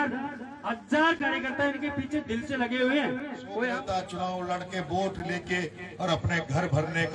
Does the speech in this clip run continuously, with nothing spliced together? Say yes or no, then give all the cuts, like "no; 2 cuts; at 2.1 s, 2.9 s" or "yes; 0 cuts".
no; 1 cut; at 3.7 s